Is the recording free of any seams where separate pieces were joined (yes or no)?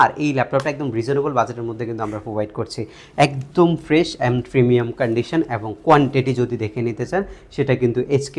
no